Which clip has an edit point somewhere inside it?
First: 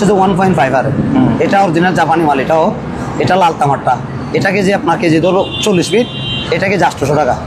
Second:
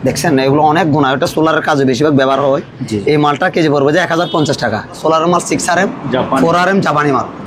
second; 1 cut; at 5.0 s

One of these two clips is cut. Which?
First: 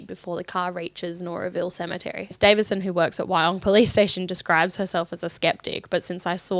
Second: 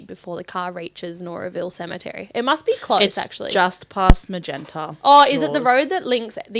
first; 1 cut; at 2.3 s

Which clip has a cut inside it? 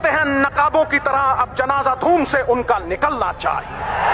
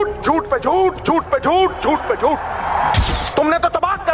second; 1 cut; at 3.0 s

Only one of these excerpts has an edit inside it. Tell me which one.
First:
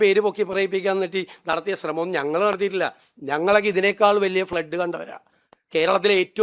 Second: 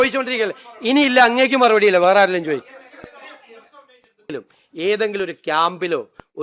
second; 1 cut; at 4.3 s

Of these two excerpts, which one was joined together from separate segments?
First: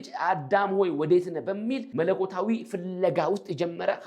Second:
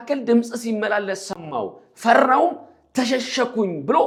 first; 1 cut; at 1.9 s

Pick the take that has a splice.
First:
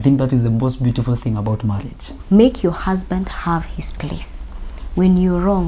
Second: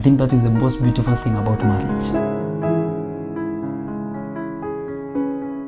first; 1 cut; at 2.1 s

